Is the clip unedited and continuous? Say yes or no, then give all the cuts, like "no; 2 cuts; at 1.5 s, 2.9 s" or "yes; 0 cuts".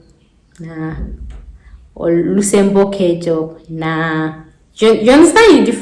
yes; 0 cuts